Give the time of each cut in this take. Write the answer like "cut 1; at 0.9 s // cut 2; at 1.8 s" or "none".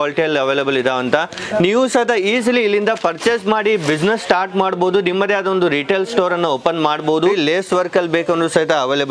cut 1; at 7.3 s